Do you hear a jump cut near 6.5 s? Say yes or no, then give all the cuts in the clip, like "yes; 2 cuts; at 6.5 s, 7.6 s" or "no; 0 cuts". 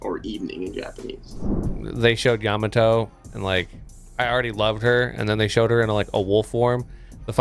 no; 1 cut; at 1.5 s